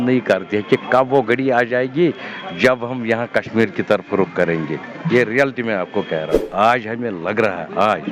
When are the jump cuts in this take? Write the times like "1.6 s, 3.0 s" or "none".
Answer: 6.4 s